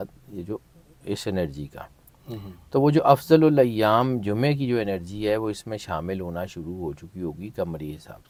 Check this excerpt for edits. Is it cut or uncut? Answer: uncut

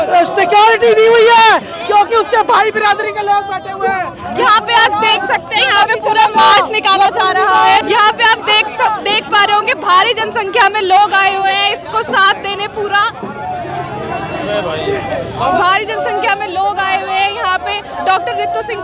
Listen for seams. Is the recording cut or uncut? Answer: uncut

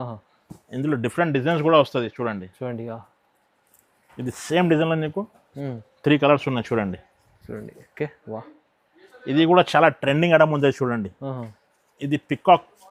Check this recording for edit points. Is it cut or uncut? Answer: uncut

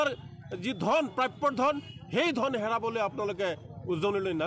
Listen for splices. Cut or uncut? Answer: uncut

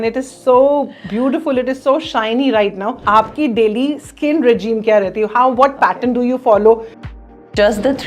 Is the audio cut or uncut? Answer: cut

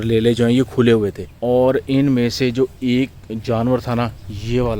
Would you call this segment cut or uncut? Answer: cut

